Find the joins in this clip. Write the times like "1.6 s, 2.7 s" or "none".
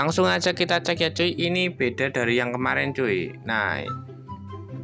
none